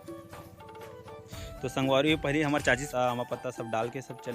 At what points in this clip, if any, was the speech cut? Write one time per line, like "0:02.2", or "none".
0:02.9